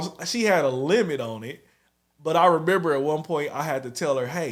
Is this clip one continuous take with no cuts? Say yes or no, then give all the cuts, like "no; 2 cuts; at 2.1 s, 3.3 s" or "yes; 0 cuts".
yes; 0 cuts